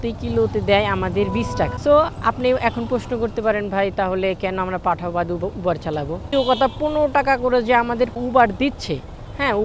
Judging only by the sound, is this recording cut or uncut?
cut